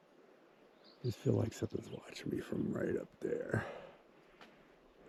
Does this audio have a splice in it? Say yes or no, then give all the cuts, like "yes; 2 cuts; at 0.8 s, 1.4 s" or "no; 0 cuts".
no; 0 cuts